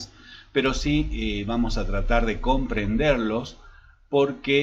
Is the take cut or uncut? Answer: cut